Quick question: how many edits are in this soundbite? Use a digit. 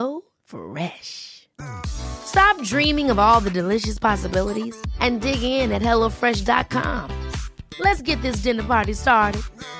0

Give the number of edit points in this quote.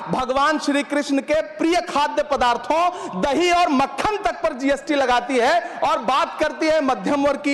0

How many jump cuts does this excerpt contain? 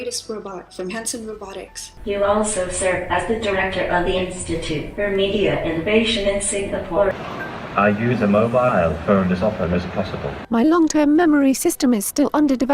3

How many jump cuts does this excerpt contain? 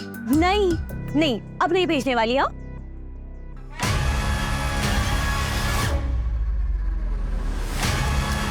0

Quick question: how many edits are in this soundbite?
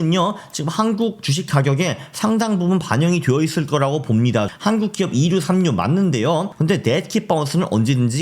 2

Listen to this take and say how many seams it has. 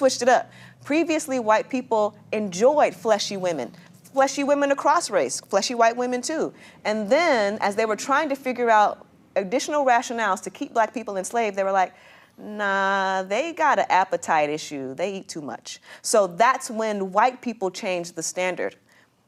0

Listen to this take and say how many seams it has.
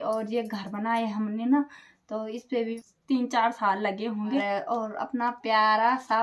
2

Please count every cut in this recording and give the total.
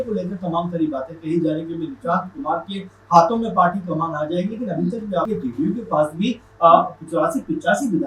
1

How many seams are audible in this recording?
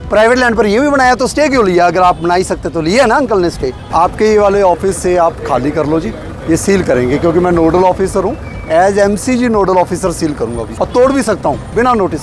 2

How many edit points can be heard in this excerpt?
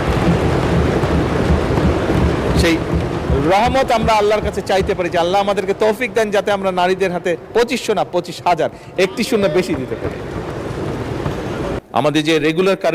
1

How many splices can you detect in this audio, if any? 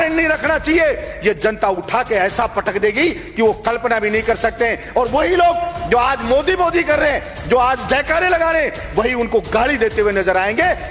0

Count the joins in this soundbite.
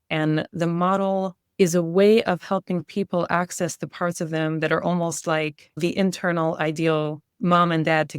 2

